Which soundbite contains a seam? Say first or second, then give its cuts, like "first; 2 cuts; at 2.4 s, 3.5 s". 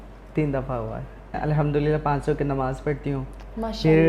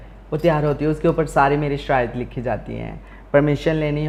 first; 1 cut; at 1.4 s